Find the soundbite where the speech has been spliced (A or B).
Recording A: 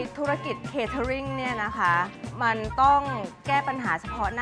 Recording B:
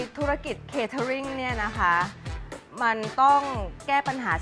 A